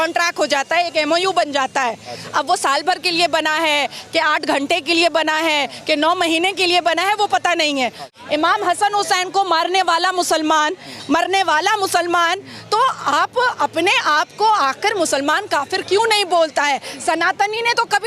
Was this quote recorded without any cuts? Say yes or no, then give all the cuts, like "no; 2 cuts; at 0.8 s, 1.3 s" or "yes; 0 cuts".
no; 1 cut; at 8.1 s